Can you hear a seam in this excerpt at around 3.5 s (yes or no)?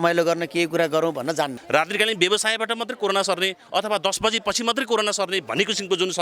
no